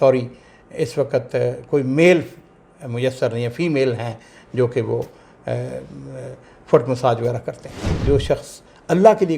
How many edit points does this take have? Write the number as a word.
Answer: one